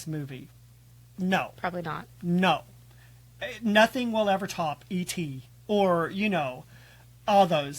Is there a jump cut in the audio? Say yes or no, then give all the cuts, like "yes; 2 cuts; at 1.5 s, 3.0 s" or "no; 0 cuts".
no; 0 cuts